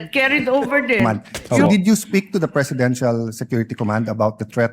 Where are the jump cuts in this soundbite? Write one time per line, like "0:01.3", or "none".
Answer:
0:01.0